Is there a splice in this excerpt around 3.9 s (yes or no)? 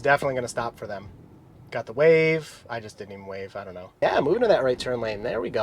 yes